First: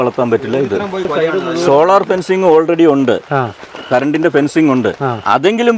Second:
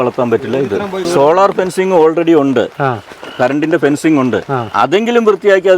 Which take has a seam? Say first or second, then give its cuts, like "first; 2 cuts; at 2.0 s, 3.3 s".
second; 1 cut; at 1.0 s